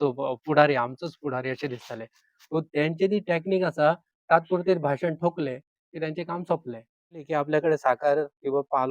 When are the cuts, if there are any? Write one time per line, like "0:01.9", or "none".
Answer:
0:07.2